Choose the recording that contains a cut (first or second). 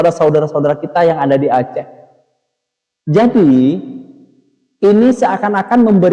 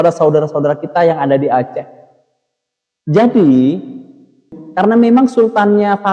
second